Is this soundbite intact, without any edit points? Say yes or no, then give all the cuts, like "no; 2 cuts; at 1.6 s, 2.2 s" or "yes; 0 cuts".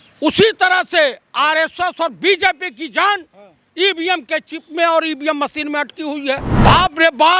no; 1 cut; at 6.5 s